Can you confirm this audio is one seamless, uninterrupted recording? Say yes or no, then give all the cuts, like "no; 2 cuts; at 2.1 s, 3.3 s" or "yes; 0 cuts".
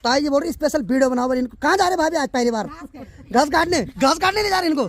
no; 1 cut; at 3.9 s